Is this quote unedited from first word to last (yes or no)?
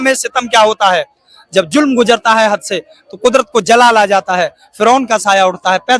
yes